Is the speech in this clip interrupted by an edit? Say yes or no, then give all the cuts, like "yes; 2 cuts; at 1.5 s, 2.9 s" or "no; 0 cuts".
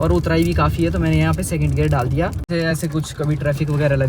yes; 1 cut; at 2.5 s